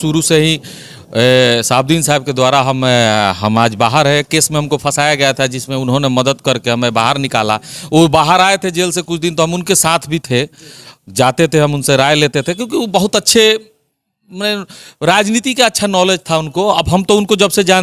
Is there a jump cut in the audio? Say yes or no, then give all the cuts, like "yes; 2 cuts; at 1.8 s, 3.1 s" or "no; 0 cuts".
no; 0 cuts